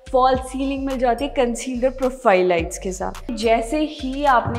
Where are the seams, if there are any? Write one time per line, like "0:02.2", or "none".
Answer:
0:03.2